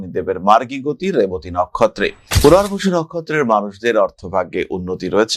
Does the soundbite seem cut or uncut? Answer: uncut